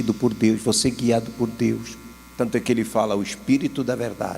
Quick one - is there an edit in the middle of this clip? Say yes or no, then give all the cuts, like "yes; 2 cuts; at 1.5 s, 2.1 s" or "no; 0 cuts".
yes; 1 cut; at 2.2 s